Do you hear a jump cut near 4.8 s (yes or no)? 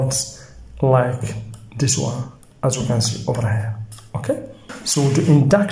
yes